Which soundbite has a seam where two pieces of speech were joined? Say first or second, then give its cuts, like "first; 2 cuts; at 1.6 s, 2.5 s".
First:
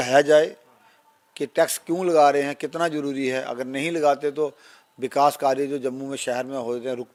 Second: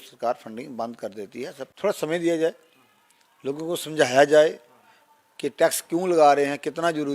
second; 1 cut; at 1.6 s